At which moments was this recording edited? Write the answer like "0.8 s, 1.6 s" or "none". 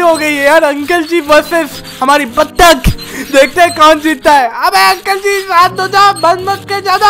none